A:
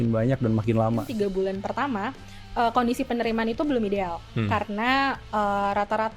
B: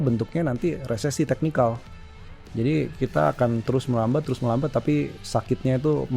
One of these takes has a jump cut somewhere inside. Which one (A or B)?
A